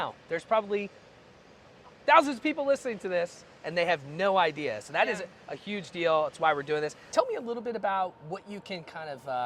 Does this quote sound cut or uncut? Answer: uncut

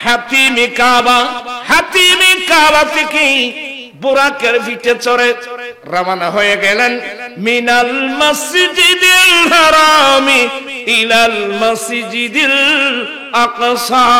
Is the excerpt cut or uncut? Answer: uncut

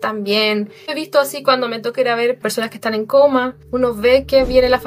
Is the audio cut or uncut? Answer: cut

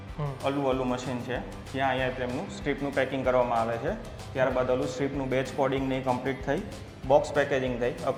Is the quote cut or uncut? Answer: uncut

